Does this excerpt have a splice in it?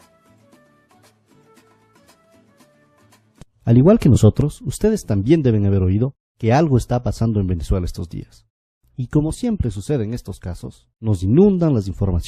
yes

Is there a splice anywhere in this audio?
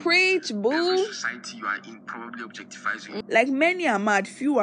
yes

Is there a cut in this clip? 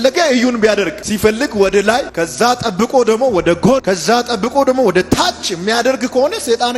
yes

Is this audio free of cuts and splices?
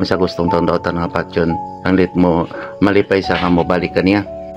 yes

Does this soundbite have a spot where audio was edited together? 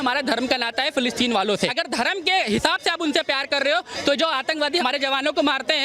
yes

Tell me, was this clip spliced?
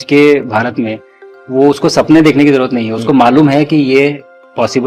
no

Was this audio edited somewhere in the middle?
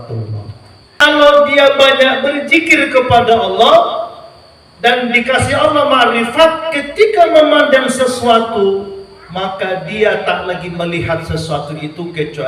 yes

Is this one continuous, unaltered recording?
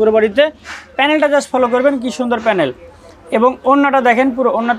yes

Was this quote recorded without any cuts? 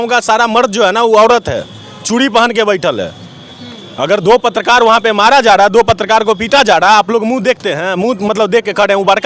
yes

